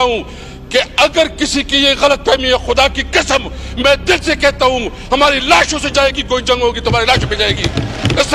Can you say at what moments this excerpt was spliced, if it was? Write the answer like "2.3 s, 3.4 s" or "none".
none